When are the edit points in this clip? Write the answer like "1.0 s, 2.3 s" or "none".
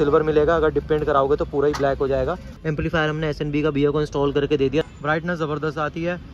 2.5 s, 4.8 s